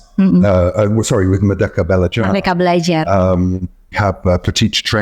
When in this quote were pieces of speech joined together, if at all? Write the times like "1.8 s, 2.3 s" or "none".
3.9 s